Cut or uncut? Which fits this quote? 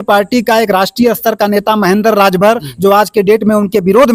uncut